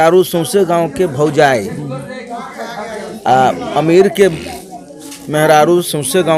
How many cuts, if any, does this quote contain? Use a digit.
0